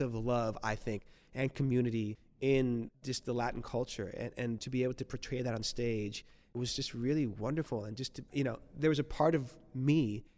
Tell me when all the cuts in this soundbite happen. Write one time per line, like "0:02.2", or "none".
none